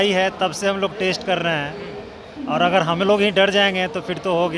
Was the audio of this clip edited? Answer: no; 0 cuts

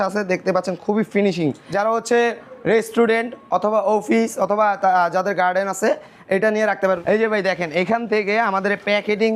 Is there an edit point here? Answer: yes; 2 cuts; at 1.6 s, 7.0 s

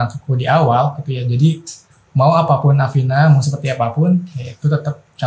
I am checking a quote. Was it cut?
no; 0 cuts

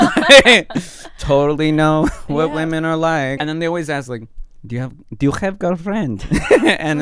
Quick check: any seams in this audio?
yes; 1 cut; at 3.4 s

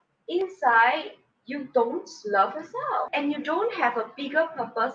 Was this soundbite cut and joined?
yes; 1 cut; at 3.1 s

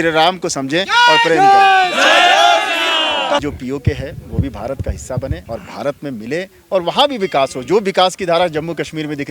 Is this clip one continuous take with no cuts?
no; 2 cuts; at 3.4 s, 5.4 s

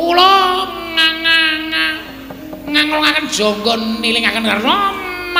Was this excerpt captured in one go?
yes; 0 cuts

